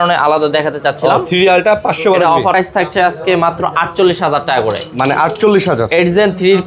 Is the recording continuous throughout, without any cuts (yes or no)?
no